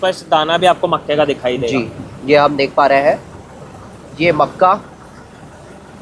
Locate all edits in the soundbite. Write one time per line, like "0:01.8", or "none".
none